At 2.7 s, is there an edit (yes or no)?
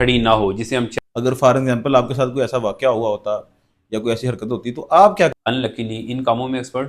no